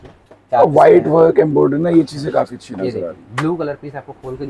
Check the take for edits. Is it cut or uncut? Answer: uncut